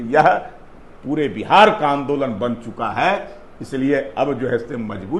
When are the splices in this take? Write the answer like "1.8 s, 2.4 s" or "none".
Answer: none